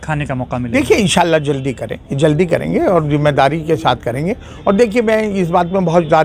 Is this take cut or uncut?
uncut